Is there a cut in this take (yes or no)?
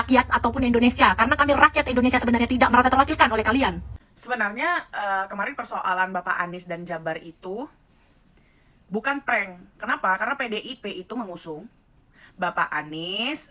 yes